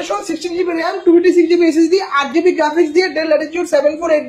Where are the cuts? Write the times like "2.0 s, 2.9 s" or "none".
none

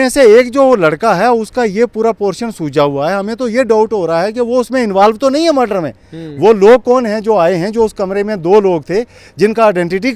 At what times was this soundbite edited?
none

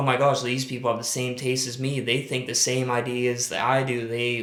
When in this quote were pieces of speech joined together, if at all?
none

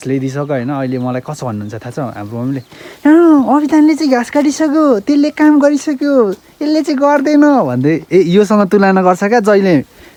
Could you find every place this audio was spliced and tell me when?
none

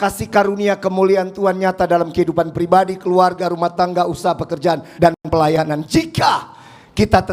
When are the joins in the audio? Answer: none

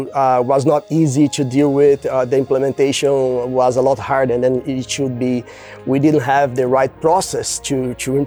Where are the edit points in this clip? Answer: none

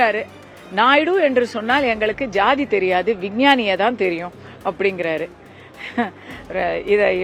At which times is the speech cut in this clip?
none

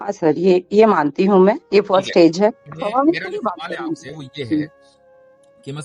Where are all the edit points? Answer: 2.7 s

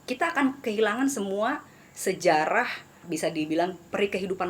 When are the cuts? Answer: 3.0 s

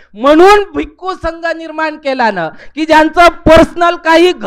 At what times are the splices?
none

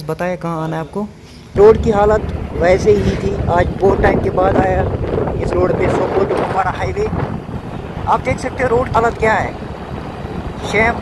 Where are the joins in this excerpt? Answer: 1.5 s

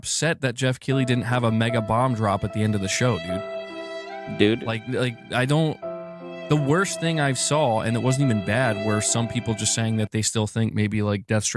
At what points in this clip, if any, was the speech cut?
none

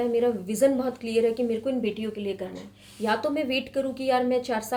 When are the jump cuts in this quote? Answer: none

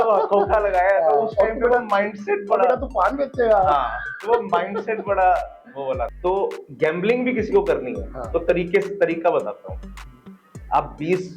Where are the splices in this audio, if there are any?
6.1 s

